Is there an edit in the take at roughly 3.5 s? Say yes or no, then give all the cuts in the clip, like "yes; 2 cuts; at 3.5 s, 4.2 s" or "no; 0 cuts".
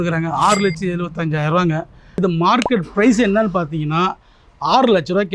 no; 1 cut; at 2.0 s